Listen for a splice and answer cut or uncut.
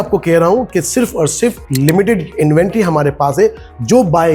uncut